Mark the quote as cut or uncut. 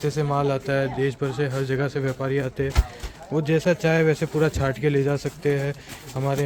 uncut